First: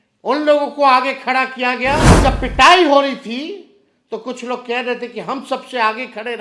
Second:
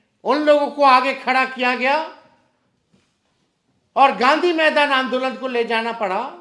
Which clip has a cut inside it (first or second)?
first